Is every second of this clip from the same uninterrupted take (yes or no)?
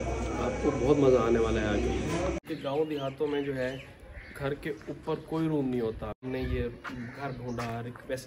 no